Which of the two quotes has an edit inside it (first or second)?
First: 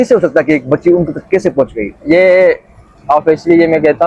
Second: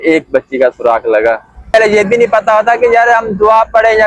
second